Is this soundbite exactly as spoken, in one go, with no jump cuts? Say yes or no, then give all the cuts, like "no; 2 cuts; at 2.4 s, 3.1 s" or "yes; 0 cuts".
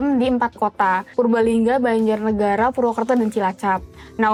yes; 0 cuts